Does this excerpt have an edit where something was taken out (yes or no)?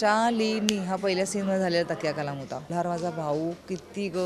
yes